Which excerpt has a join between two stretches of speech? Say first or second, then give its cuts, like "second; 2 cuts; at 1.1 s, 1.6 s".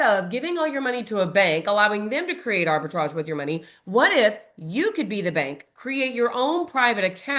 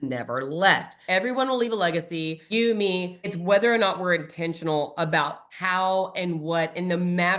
second; 4 cuts; at 0.9 s, 2.4 s, 3.3 s, 5.5 s